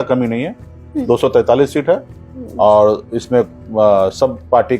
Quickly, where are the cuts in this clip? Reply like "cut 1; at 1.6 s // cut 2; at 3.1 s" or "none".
none